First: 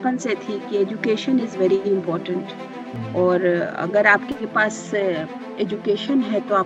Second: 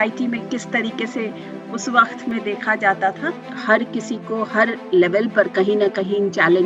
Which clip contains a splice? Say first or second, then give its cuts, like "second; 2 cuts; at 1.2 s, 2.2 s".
second; 1 cut; at 3.6 s